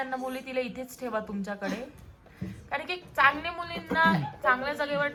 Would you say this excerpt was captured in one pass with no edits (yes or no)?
yes